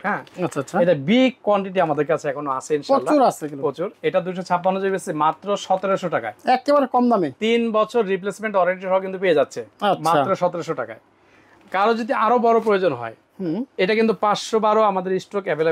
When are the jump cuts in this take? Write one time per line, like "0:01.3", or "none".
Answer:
none